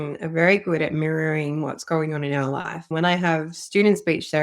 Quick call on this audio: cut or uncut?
cut